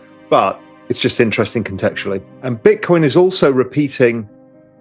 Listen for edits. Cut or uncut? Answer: cut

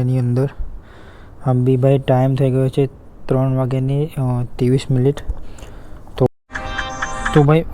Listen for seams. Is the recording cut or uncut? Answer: cut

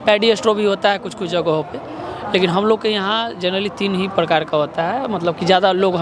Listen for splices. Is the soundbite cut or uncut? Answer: uncut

